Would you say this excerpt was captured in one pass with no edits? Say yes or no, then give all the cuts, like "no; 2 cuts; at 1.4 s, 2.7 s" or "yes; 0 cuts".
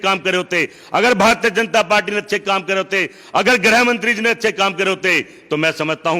yes; 0 cuts